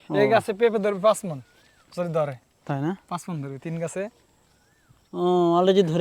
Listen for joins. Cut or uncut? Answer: uncut